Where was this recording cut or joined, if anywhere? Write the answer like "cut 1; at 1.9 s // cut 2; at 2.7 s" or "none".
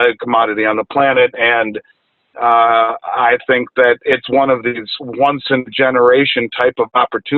none

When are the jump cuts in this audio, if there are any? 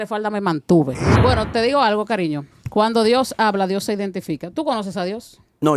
cut 1; at 1.1 s

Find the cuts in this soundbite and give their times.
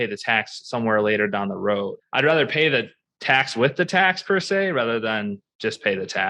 none

